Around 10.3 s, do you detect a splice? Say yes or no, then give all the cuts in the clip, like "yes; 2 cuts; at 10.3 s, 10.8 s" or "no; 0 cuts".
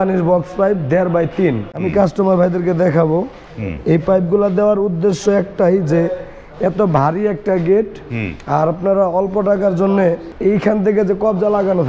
yes; 3 cuts; at 1.8 s, 3.4 s, 10.3 s